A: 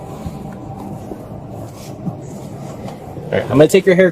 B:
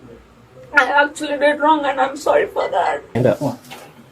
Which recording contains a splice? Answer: B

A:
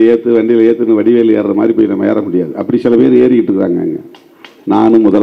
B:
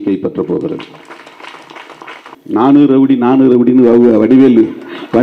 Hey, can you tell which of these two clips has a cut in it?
B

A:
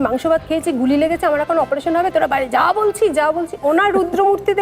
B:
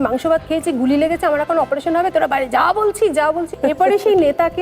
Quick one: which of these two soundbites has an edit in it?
B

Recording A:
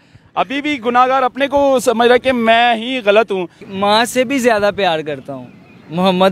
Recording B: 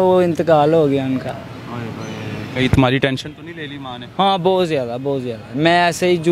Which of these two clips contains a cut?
A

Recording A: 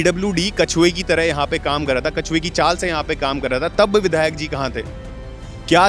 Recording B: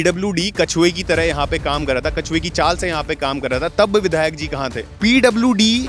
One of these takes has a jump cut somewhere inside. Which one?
B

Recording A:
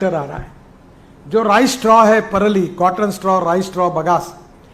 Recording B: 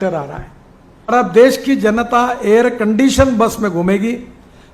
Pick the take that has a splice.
B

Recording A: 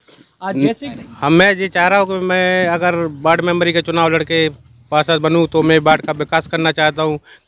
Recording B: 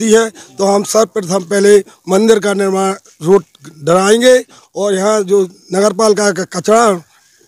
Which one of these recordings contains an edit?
A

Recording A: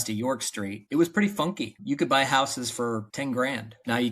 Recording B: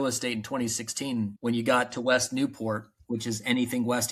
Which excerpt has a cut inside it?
A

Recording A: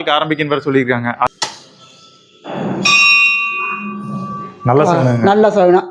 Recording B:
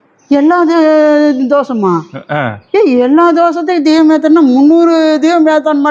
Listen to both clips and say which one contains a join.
A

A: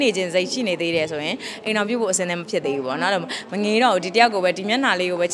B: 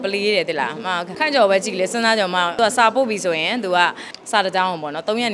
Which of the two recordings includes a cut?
B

